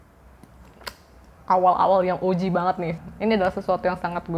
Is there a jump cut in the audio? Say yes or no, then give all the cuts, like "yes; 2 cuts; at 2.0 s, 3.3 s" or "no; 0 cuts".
yes; 1 cut; at 3.0 s